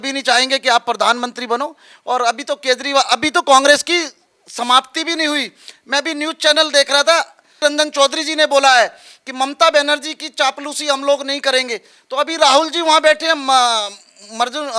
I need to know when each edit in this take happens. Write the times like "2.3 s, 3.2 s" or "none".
none